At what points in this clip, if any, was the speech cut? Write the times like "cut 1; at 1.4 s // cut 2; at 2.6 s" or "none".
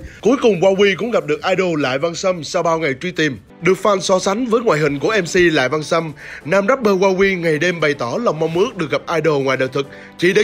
none